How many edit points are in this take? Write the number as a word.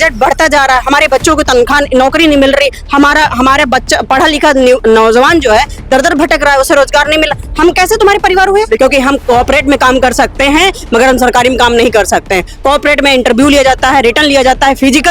one